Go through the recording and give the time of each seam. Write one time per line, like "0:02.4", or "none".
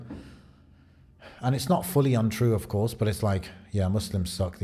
none